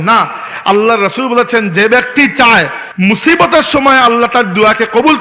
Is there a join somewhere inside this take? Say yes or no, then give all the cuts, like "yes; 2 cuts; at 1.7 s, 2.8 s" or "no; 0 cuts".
yes; 1 cut; at 2.8 s